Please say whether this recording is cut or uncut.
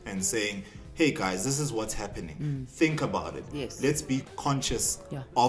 cut